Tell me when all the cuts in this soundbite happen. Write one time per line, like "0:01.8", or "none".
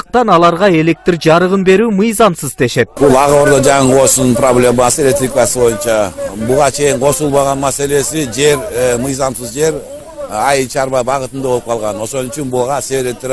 none